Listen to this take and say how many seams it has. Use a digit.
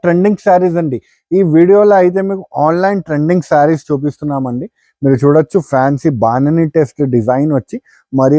0